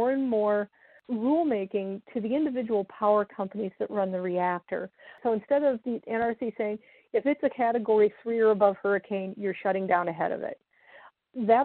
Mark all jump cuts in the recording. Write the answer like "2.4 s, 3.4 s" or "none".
5.1 s

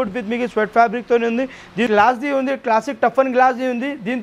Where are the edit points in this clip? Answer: 1.9 s

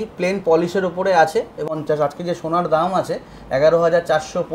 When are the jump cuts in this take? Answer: 1.8 s

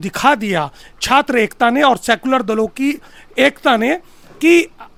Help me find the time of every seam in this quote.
none

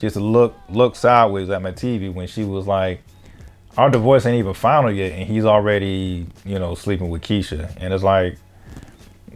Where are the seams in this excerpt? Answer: none

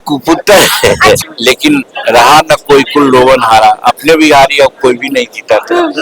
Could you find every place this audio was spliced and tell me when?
1.2 s

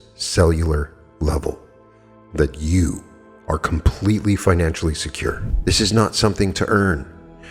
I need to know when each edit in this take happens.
5.5 s

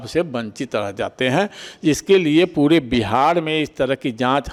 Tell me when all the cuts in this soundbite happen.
none

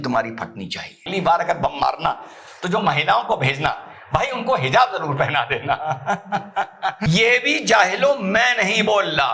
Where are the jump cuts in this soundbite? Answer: 1.0 s, 6.7 s

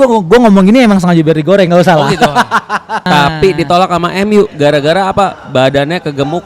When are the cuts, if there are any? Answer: 3.1 s

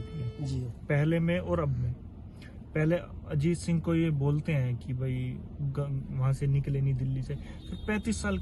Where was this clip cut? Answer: none

